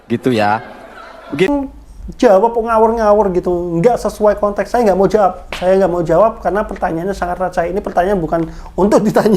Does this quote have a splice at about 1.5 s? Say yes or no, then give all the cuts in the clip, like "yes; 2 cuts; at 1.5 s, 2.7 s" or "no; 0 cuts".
yes; 1 cut; at 1.5 s